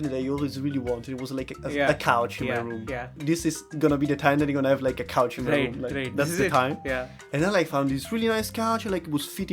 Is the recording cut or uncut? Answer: cut